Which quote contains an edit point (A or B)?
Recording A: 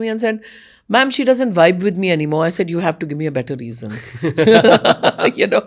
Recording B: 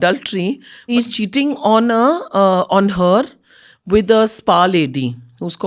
B